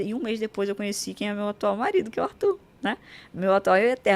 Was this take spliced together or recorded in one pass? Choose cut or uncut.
uncut